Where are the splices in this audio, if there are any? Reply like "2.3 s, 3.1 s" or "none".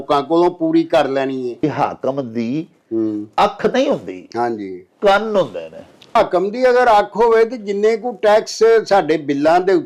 1.6 s, 6.2 s